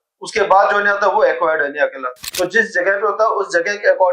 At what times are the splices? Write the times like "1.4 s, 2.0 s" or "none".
2.2 s